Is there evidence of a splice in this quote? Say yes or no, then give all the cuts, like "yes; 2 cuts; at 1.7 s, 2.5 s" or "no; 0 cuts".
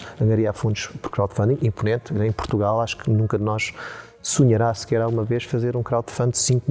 no; 0 cuts